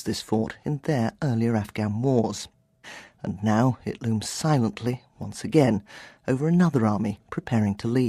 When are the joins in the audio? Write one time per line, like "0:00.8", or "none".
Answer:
none